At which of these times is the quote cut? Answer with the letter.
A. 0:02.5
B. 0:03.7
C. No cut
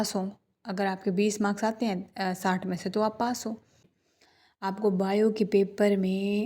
B